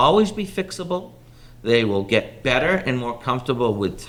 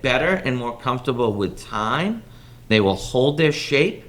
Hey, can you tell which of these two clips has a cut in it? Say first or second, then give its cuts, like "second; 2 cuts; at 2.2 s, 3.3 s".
second; 1 cut; at 2.7 s